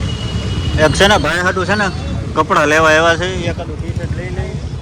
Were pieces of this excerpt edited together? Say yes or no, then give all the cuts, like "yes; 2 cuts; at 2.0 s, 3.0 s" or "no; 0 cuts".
no; 0 cuts